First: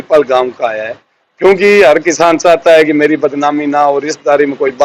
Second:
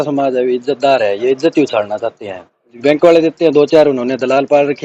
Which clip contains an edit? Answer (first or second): second